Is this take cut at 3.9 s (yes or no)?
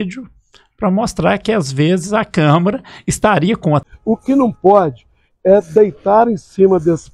yes